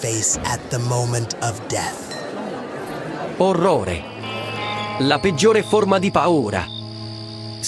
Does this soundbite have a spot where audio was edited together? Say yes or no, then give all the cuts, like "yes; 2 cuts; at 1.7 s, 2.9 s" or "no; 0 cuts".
yes; 1 cut; at 3.4 s